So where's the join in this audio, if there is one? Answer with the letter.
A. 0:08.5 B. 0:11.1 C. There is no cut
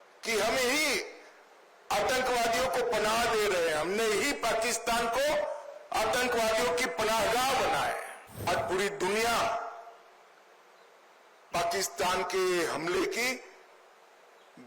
A